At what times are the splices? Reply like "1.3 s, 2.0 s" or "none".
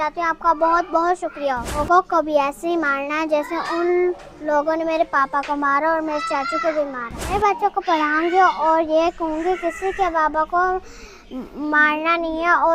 1.8 s, 7.2 s